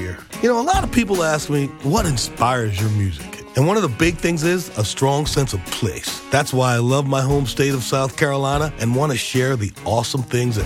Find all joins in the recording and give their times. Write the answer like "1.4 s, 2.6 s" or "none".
none

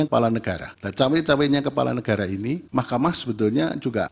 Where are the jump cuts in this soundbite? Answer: none

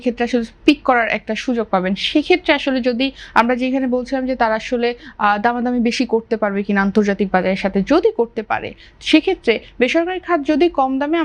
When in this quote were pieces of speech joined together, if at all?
none

